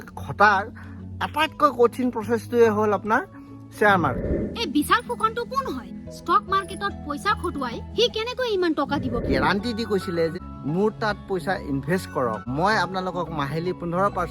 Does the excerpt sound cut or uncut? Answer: cut